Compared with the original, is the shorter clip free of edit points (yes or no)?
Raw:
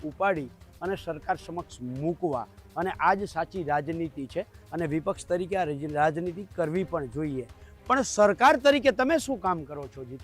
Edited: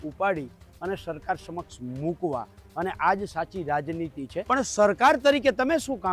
no